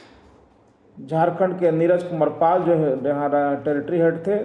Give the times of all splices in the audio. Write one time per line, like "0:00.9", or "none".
none